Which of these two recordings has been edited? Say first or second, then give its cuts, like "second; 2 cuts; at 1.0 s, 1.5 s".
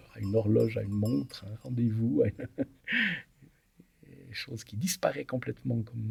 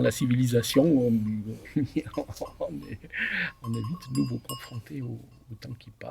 second; 1 cut; at 1.6 s